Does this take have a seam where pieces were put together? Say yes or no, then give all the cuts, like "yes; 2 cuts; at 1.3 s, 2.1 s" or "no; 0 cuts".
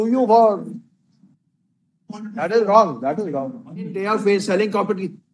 yes; 1 cut; at 4.0 s